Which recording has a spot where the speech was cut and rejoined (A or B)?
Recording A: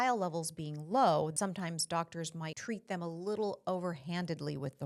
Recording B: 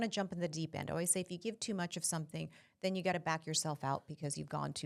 A